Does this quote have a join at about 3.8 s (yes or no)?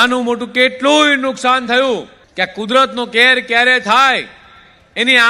no